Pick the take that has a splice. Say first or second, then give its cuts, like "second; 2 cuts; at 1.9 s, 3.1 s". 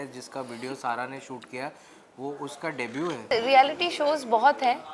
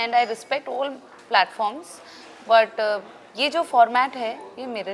first; 1 cut; at 3.2 s